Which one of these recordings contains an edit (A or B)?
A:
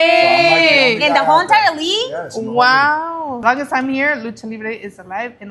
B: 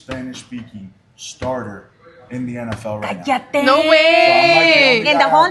A